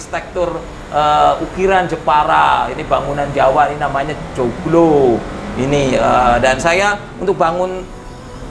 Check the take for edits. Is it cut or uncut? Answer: uncut